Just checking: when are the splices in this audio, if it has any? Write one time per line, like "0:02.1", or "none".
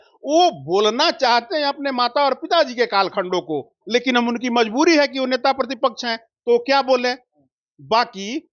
none